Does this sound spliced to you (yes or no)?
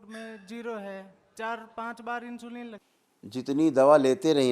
yes